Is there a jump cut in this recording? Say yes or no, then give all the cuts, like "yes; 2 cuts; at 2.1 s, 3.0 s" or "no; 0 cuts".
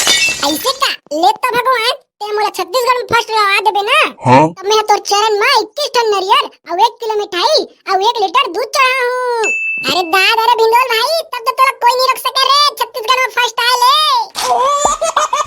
yes; 1 cut; at 14.3 s